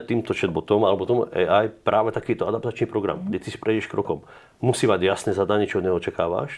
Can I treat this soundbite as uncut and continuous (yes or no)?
yes